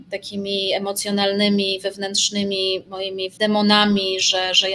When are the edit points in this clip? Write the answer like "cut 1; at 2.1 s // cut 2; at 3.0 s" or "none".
cut 1; at 3.3 s

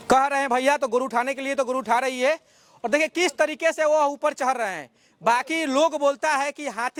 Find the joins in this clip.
none

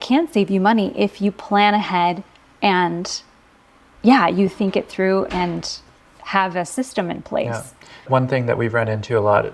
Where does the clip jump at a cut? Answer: cut 1; at 8.0 s

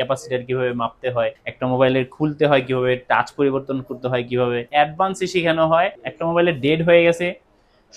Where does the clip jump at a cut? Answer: cut 1; at 1.5 s // cut 2; at 4.7 s // cut 3; at 6.1 s

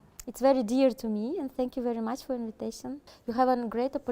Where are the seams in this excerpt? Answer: cut 1; at 3.1 s

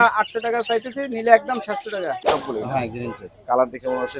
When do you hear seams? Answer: cut 1; at 2.2 s

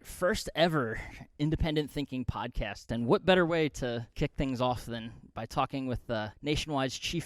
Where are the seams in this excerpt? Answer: cut 1; at 2.9 s // cut 2; at 4.1 s // cut 3; at 6.3 s

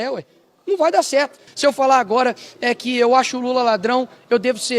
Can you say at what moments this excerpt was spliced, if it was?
cut 1; at 1.4 s

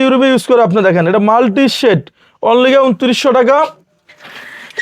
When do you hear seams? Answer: none

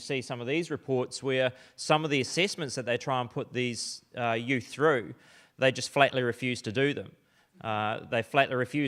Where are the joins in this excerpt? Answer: none

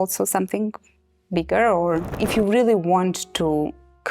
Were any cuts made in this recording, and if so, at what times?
cut 1; at 2.1 s

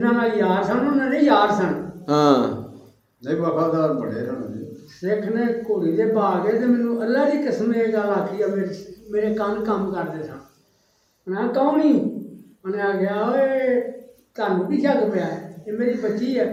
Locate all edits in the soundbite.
none

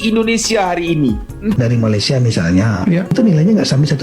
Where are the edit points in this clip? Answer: cut 1; at 1.6 s

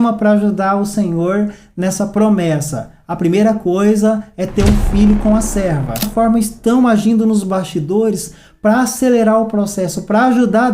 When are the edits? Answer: cut 1; at 6.0 s

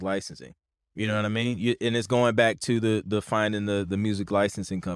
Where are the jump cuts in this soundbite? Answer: none

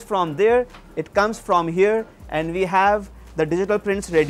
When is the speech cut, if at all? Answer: none

